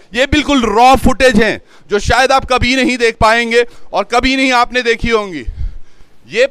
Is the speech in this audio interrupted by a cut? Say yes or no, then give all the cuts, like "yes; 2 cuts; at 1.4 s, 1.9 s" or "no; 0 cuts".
no; 0 cuts